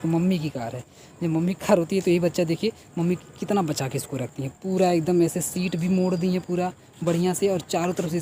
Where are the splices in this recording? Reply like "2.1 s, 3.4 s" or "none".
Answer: none